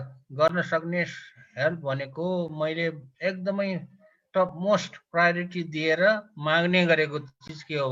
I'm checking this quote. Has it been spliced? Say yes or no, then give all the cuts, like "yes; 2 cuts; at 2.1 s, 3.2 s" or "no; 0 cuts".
no; 0 cuts